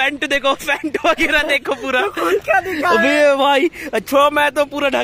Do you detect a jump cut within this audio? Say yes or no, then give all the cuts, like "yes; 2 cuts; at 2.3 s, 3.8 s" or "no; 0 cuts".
no; 0 cuts